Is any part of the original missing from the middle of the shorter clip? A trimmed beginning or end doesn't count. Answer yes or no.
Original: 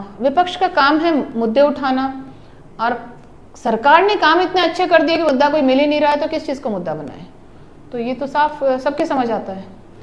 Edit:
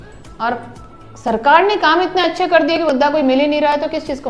no